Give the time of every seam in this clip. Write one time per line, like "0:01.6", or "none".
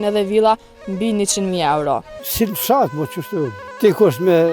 0:02.2
0:03.6